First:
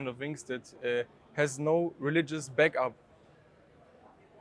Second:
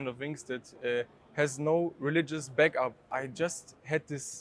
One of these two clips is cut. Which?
second; 1 cut; at 3.0 s

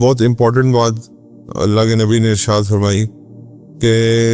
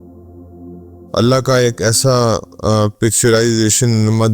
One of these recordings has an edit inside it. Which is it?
second; 1 cut; at 1.1 s

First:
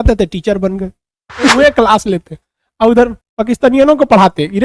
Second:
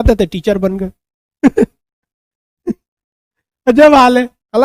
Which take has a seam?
first; 1 cut; at 1.6 s

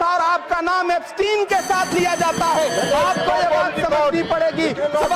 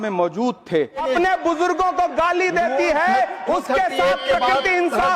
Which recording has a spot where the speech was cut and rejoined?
second; 1 cut; at 1.0 s

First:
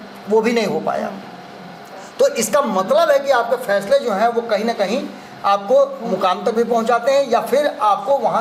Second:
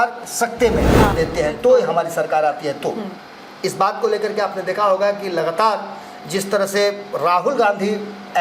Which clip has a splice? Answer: second; 1 cut; at 1.1 s

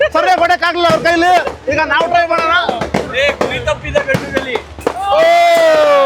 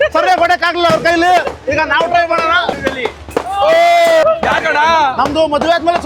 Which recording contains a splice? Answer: second; 2 cuts; at 2.8 s, 4.2 s

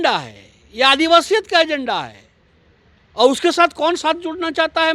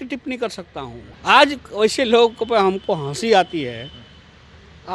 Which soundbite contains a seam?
second; 1 cut; at 1.0 s

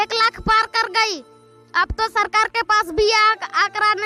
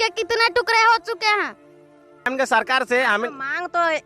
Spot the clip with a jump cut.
second; 1 cut; at 2.3 s

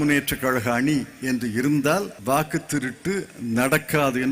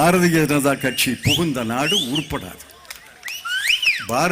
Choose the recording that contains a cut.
first; 1 cut; at 2.1 s

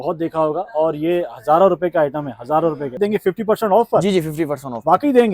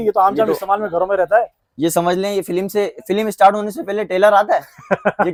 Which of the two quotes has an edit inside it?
first; 1 cut; at 3.0 s

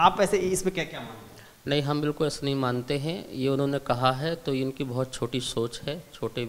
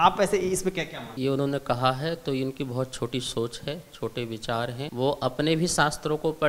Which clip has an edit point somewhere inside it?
second; 2 cuts; at 1.1 s, 4.8 s

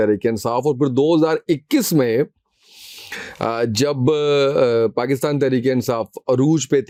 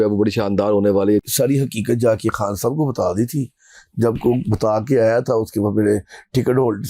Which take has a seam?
second; 1 cut; at 1.2 s

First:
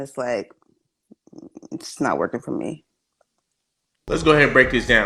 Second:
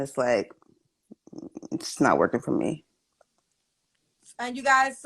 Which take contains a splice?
second; 1 cut; at 3.9 s

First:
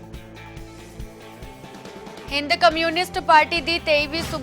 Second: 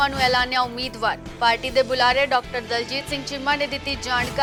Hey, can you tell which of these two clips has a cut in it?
first; 1 cut; at 1.7 s

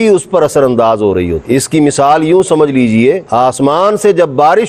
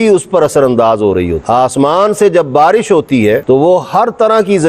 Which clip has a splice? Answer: second; 1 cut; at 1.4 s

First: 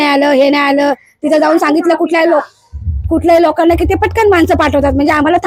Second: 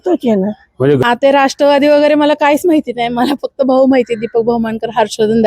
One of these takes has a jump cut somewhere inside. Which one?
second; 1 cut; at 1.0 s

